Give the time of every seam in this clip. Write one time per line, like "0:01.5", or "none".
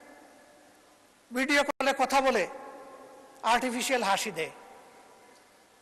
none

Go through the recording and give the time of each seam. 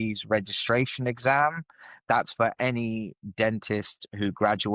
none

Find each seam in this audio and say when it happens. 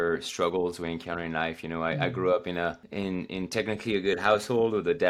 0:02.8

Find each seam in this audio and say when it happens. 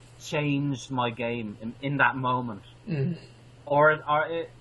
none

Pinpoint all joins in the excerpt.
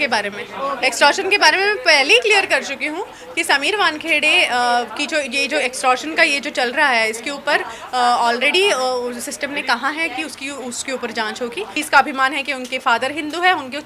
0:11.8

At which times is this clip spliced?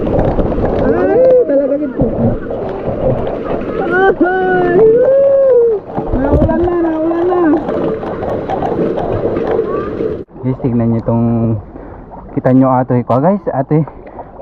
0:10.2

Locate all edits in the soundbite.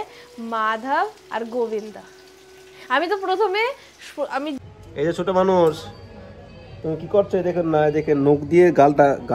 0:04.6

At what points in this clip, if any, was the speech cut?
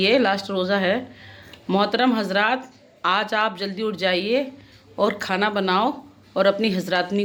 none

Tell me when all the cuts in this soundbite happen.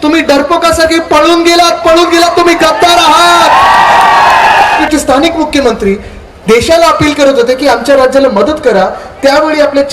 0:04.8

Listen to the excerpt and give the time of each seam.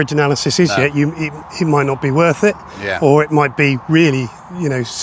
none

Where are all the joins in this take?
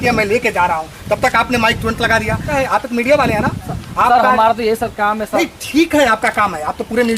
0:02.5

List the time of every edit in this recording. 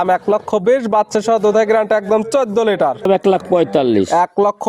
0:03.1

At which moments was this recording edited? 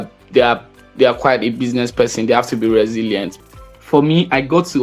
0:03.4

